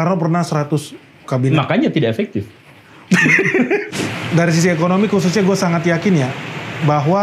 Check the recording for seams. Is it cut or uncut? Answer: cut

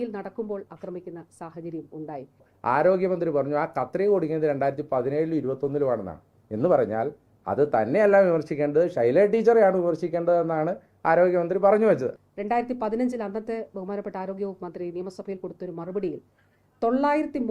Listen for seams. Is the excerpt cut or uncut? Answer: cut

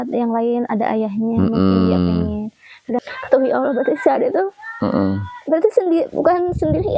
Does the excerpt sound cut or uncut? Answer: cut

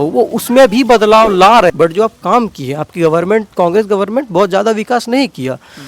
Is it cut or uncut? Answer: cut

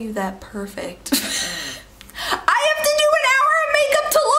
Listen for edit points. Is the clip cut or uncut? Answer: uncut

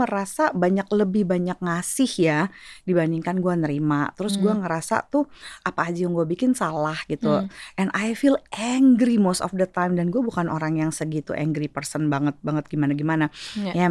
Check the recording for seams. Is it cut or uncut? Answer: uncut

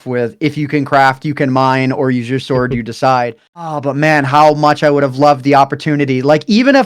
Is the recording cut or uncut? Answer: cut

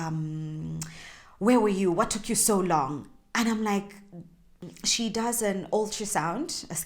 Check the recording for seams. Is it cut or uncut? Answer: cut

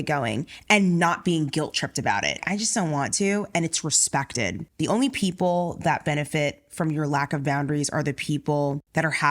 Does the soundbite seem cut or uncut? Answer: cut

